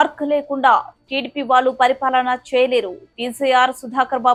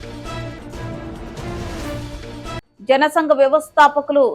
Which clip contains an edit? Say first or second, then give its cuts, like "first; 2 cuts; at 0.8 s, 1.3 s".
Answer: second; 1 cut; at 2.7 s